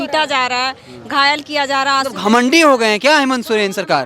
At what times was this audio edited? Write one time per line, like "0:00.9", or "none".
none